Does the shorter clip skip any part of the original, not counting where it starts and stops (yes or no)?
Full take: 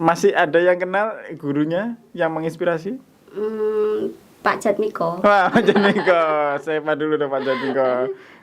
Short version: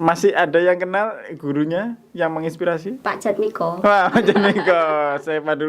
yes